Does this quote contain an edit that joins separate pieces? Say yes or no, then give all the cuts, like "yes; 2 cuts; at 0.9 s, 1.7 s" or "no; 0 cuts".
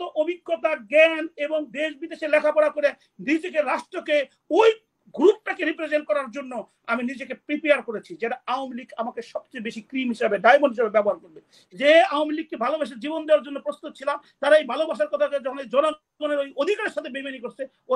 yes; 1 cut; at 11.6 s